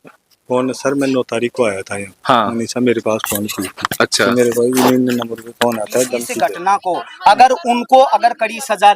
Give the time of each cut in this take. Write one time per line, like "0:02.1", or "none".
0:06.2